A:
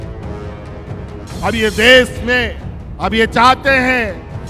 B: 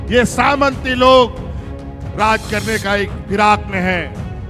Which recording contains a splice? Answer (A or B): A